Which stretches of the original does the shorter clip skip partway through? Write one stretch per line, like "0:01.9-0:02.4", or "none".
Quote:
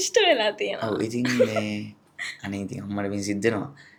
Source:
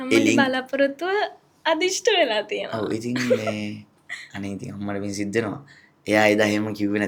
none